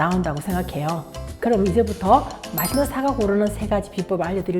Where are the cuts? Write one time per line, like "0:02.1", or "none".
0:01.3